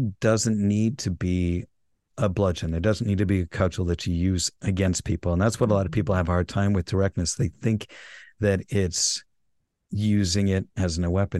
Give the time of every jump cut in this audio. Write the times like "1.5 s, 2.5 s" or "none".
none